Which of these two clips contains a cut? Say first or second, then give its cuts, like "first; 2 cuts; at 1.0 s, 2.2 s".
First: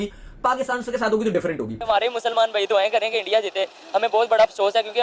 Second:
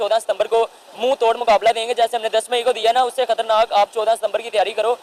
first; 1 cut; at 1.8 s